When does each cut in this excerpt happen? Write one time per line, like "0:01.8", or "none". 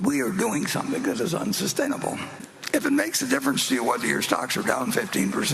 0:02.6